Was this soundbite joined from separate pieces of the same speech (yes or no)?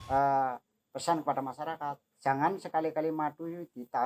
no